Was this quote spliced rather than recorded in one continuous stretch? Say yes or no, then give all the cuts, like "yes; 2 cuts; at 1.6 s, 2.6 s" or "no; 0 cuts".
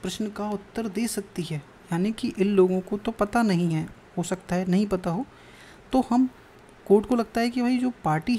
no; 0 cuts